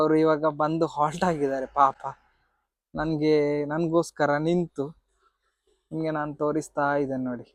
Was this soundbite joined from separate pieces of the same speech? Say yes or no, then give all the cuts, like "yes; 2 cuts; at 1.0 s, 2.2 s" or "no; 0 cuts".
no; 0 cuts